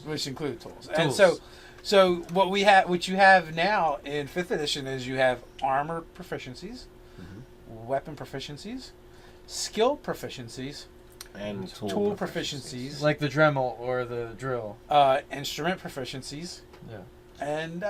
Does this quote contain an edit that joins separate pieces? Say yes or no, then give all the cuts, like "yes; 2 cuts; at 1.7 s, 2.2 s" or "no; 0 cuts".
yes; 1 cut; at 5.5 s